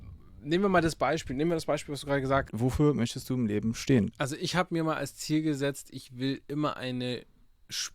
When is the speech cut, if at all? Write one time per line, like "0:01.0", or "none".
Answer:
0:02.5
0:04.1